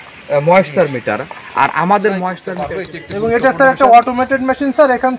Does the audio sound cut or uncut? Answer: cut